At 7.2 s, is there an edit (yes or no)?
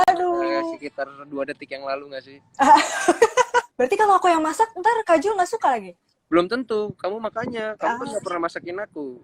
no